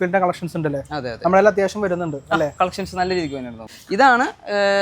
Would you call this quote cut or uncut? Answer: cut